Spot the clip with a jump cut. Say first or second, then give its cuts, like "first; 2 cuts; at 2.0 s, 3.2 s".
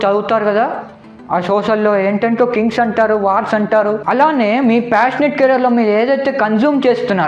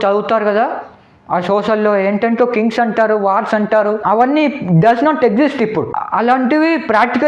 first; 1 cut; at 4.0 s